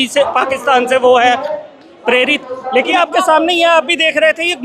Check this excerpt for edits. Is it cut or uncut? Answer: cut